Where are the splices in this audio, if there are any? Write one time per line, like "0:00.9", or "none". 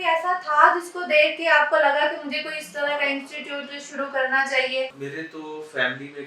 0:05.0